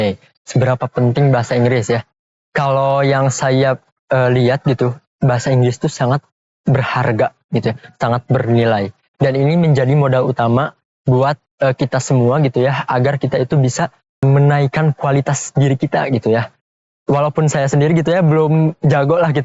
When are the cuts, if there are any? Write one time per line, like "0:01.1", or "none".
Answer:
0:14.2